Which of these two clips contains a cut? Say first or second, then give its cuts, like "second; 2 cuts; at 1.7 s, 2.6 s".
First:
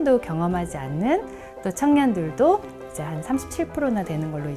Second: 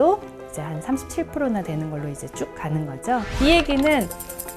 second; 1 cut; at 3.3 s